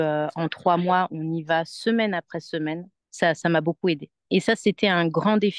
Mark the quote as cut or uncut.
cut